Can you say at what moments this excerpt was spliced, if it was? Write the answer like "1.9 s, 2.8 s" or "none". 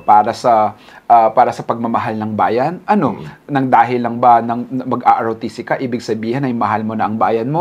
none